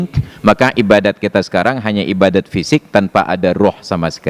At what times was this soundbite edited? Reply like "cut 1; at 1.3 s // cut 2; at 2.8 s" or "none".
none